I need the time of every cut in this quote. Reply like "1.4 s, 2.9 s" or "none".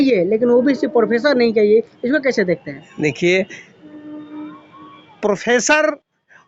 none